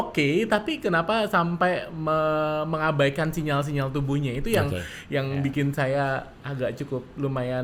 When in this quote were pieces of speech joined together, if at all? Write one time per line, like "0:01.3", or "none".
none